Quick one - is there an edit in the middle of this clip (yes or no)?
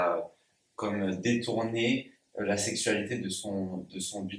no